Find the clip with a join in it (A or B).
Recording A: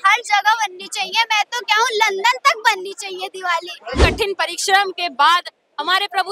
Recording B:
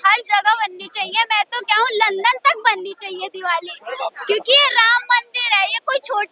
A